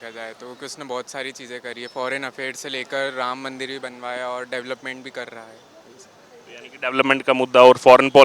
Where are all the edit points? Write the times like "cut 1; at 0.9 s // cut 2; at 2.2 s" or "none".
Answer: none